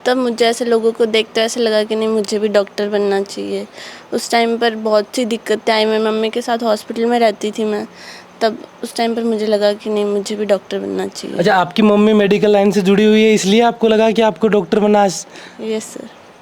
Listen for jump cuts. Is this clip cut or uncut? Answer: uncut